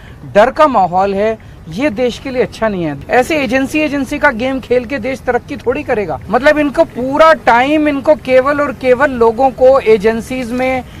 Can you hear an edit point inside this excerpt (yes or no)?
yes